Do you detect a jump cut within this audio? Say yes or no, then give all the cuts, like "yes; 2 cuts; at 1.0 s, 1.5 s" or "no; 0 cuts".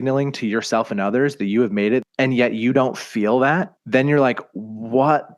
yes; 2 cuts; at 2.1 s, 3.8 s